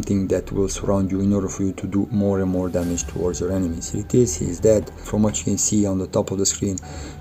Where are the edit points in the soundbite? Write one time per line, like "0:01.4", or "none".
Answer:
0:05.0